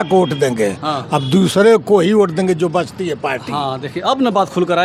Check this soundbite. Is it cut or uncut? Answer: uncut